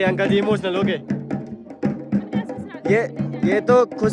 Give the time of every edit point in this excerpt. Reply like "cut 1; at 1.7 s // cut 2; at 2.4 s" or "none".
none